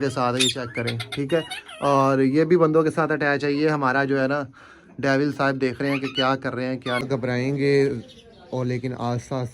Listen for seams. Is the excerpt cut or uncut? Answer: cut